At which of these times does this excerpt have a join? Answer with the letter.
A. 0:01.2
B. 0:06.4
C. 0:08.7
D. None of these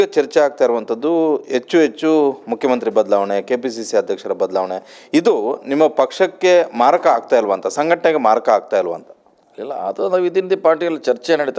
D